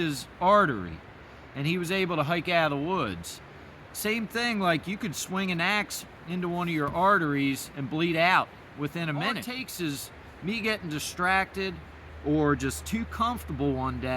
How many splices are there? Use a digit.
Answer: 1